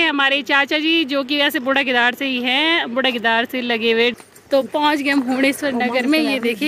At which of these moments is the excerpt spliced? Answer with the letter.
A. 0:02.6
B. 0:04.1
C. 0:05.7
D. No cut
B